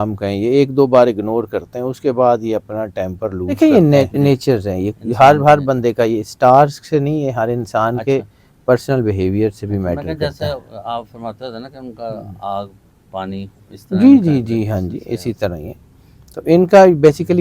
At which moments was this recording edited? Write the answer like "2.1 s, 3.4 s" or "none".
3.6 s